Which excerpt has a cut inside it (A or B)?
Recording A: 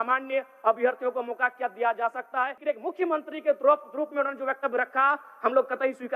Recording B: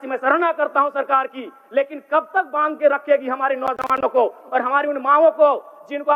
A